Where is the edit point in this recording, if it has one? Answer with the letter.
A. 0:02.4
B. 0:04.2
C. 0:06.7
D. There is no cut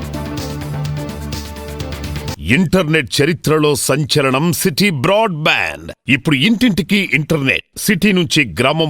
A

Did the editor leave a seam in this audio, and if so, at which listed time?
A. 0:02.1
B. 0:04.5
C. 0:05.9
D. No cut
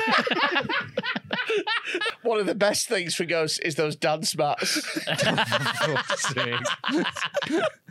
A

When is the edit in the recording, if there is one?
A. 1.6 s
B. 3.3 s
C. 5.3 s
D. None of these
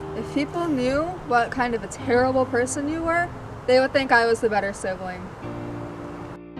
C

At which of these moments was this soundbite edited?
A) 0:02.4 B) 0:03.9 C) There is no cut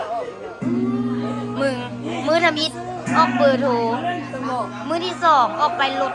C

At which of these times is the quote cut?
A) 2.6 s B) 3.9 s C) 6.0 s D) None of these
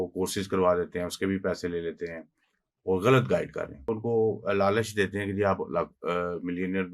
B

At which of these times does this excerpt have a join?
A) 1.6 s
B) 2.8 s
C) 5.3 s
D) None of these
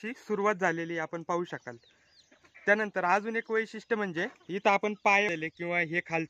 C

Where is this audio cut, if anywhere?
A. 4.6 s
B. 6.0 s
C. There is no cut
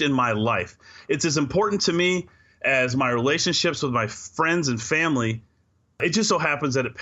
B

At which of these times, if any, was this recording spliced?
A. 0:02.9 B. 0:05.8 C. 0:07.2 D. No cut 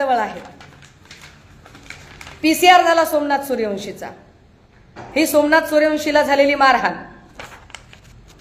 D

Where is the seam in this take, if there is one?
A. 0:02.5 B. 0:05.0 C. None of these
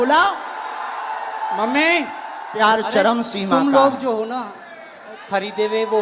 A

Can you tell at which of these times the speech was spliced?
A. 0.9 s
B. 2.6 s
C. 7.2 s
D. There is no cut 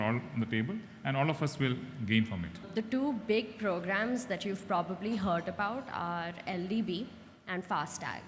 B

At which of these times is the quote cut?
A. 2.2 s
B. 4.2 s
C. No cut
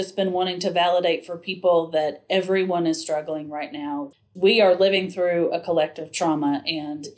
B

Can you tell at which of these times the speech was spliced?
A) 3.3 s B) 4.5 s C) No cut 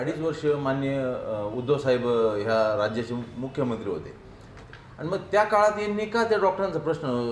B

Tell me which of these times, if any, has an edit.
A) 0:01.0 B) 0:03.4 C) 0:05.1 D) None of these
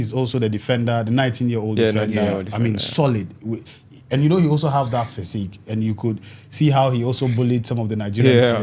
D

